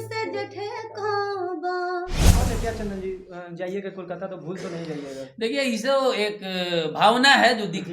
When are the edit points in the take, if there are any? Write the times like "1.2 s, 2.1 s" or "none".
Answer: 2.2 s